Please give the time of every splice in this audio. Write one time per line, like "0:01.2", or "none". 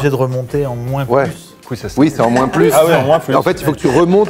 none